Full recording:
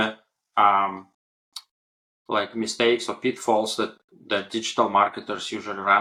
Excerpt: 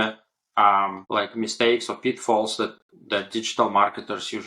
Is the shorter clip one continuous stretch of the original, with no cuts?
no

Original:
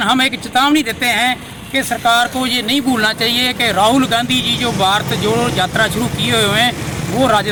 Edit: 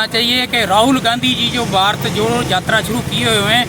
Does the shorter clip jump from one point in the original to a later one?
no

